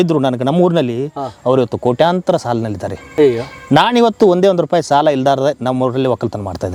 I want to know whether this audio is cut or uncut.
uncut